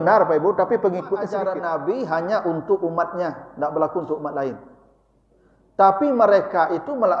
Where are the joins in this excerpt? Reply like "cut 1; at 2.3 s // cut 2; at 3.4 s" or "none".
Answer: cut 1; at 1.3 s

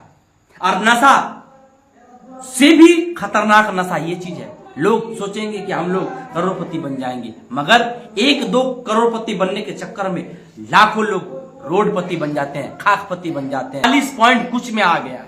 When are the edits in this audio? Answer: cut 1; at 13.8 s

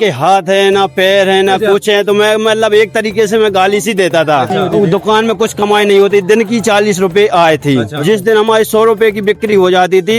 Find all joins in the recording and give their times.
cut 1; at 4.6 s // cut 2; at 7.9 s

